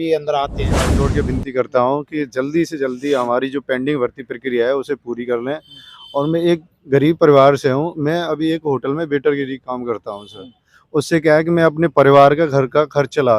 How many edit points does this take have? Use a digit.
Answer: 1